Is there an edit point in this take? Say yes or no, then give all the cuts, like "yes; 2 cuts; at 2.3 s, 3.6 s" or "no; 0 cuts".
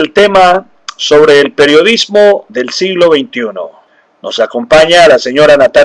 no; 0 cuts